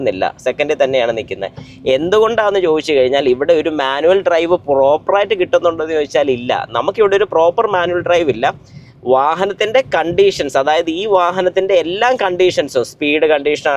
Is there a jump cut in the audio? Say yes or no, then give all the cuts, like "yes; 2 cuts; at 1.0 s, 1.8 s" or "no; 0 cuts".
no; 0 cuts